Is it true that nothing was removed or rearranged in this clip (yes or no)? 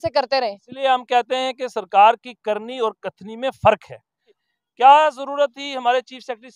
no